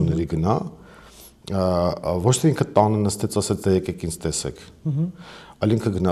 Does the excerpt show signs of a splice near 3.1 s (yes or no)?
no